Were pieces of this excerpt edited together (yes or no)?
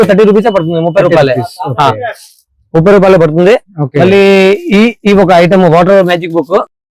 no